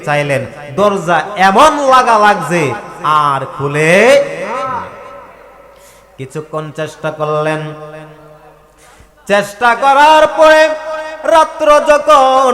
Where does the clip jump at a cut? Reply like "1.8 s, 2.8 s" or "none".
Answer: none